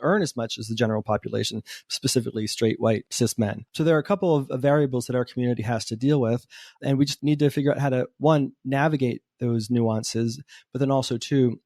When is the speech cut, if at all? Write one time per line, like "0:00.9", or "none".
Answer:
0:03.3
0:07.1